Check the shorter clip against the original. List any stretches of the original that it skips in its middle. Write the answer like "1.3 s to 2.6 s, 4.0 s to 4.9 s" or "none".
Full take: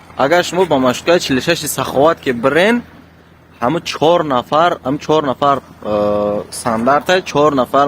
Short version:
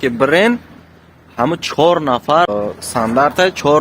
4.7 s to 6.2 s